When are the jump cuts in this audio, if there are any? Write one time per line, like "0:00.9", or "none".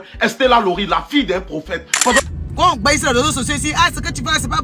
0:02.2

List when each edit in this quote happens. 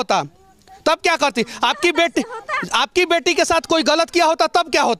none

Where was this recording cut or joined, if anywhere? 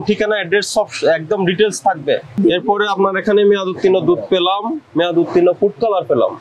0:02.3

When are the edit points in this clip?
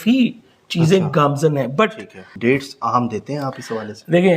0:02.3

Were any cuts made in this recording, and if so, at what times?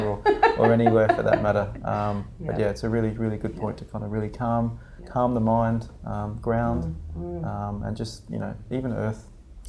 none

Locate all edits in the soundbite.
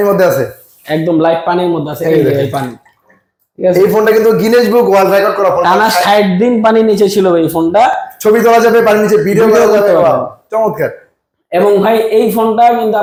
none

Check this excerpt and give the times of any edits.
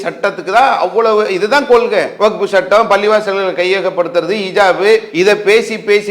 0:02.1
0:05.1

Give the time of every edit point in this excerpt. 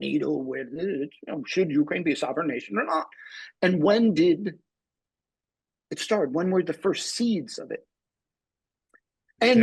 none

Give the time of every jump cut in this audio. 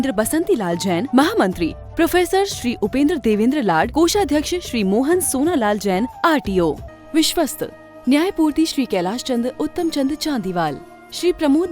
0:06.9

